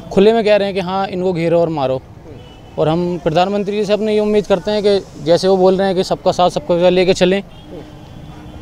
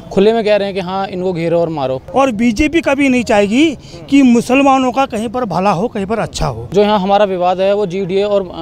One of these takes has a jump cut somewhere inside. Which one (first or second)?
second